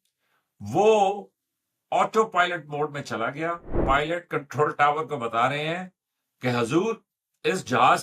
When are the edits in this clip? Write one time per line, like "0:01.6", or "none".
0:03.7

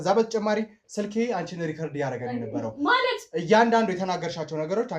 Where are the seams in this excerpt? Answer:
none

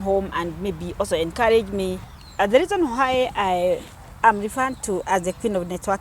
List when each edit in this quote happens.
0:02.1

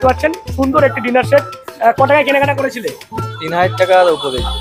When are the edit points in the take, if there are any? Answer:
none

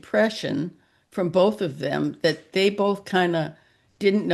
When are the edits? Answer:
none

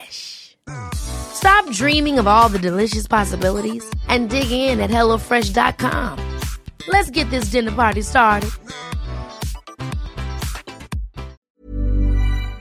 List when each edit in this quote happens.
0:11.4

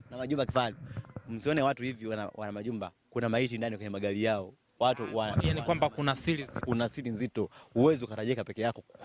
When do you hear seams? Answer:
0:01.8

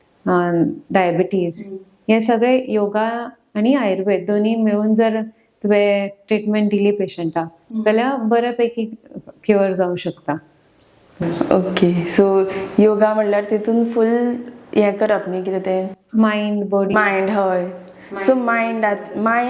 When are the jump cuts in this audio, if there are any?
none

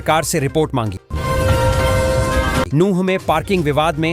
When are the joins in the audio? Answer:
0:01.1
0:02.7

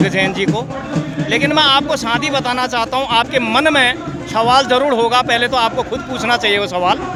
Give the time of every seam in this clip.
none

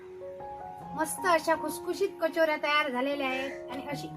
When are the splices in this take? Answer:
0:01.0

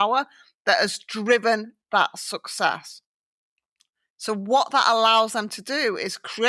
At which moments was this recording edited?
none

